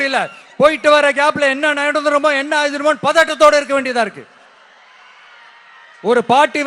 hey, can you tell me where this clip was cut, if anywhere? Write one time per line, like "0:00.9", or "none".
none